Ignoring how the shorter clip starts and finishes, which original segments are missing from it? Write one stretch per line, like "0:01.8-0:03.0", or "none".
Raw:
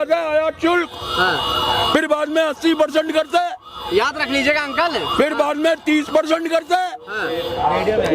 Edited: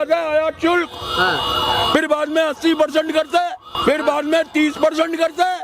0:03.7-0:05.0